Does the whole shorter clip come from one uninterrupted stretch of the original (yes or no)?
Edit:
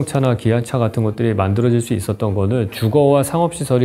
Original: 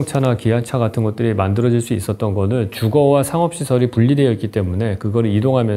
yes